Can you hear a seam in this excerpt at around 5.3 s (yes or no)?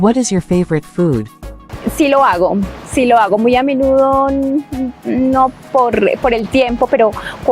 no